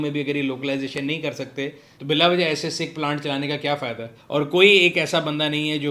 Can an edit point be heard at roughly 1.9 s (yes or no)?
yes